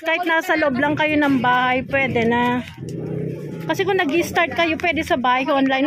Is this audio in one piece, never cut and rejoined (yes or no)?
yes